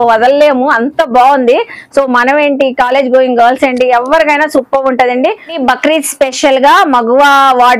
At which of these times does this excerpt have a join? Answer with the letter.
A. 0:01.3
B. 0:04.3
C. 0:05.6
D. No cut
C